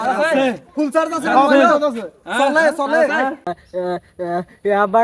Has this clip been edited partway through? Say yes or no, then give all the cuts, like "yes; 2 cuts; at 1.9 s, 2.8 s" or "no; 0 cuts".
yes; 1 cut; at 3.5 s